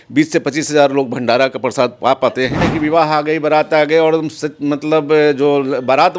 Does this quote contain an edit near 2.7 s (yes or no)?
yes